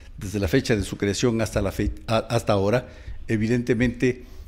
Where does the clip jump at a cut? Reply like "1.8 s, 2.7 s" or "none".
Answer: none